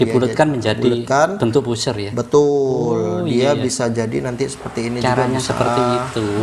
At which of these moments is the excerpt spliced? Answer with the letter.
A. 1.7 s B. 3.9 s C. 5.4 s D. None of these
D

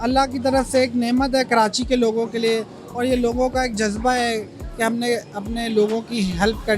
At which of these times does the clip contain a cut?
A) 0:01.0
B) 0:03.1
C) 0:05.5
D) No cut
D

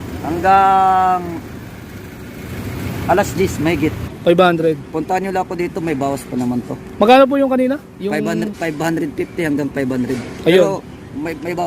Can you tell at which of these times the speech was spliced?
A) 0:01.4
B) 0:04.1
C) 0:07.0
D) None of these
B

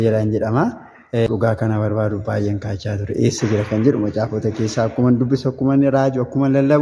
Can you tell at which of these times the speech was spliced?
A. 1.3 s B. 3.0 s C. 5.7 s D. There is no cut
A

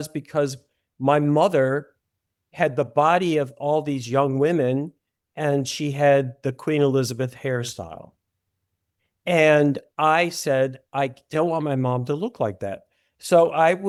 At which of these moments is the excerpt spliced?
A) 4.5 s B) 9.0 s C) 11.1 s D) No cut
D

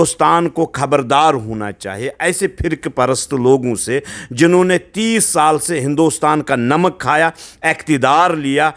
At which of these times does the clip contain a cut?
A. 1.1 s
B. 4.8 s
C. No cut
C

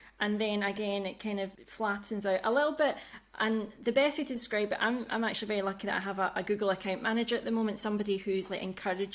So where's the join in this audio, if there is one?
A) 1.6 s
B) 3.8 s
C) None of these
A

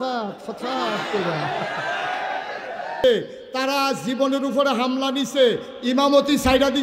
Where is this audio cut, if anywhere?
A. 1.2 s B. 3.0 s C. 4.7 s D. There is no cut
B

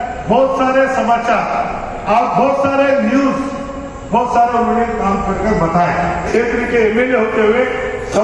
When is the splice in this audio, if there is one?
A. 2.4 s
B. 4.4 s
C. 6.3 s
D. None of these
C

